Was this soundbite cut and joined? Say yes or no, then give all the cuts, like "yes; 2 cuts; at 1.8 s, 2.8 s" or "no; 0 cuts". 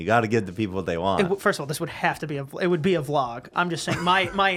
no; 0 cuts